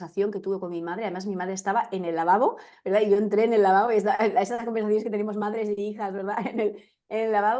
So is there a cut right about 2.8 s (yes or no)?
no